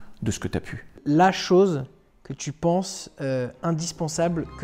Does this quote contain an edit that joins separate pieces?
yes; 1 cut; at 1.0 s

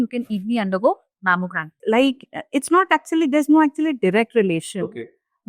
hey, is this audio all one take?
no; 1 cut; at 1.8 s

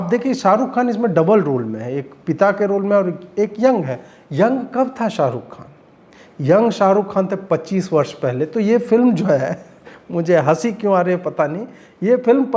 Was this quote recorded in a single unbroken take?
yes; 0 cuts

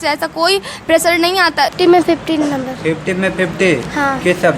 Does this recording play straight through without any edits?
no; 1 cut; at 1.7 s

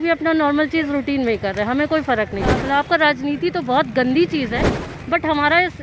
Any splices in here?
yes; 2 cuts; at 2.6 s, 4.8 s

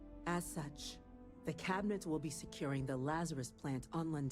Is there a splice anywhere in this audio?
no; 0 cuts

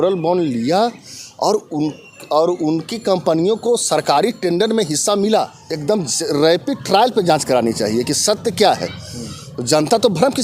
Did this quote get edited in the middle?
yes; 1 cut; at 5.6 s

